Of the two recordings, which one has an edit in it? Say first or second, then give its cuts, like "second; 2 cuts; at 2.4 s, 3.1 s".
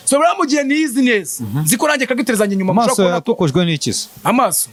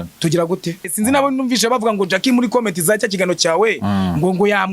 second; 1 cut; at 0.9 s